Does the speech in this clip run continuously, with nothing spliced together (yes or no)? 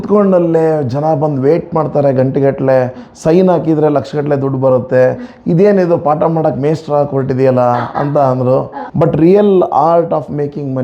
no